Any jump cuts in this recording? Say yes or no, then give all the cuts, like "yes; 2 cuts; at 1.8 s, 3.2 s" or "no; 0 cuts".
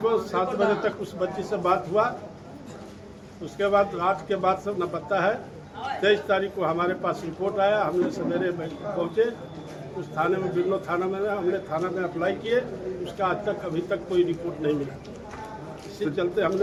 no; 0 cuts